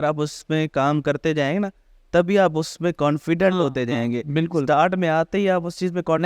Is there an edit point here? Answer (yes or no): no